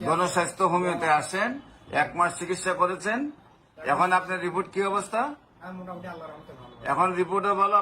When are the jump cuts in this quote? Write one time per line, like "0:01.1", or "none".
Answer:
none